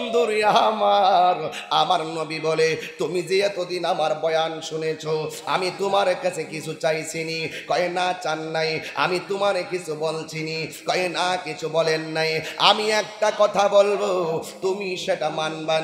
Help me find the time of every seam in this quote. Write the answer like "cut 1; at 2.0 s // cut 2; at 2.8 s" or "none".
none